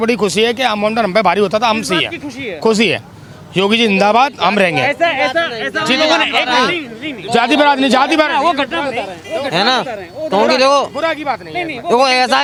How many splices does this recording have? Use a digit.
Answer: 0